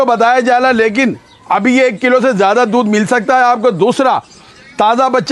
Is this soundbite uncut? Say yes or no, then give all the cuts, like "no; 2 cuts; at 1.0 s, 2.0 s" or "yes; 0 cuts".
yes; 0 cuts